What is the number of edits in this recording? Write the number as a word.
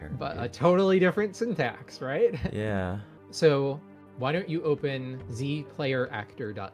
two